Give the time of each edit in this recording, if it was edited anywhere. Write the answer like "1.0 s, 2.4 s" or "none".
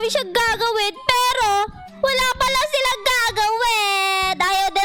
none